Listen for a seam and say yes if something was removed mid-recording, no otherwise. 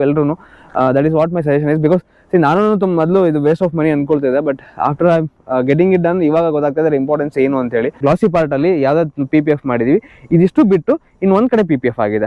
yes